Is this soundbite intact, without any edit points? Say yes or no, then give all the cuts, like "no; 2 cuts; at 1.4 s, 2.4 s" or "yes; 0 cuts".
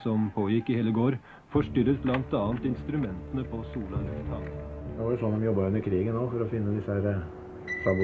no; 1 cut; at 4.8 s